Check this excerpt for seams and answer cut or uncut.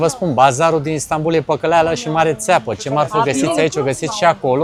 uncut